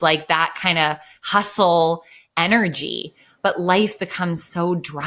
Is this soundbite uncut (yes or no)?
yes